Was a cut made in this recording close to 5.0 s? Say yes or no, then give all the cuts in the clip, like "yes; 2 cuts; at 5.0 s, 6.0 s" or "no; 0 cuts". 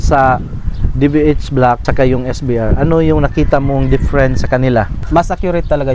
yes; 2 cuts; at 1.9 s, 5.0 s